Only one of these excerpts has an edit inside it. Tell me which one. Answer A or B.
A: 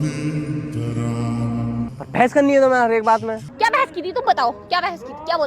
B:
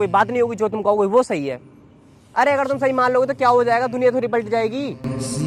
A